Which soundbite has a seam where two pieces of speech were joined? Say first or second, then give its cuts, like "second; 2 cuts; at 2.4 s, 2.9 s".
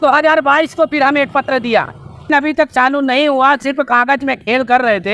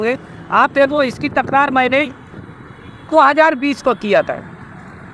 first; 1 cut; at 2.3 s